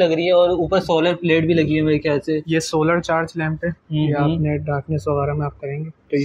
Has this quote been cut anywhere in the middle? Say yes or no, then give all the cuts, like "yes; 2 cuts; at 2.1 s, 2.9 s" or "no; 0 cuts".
no; 0 cuts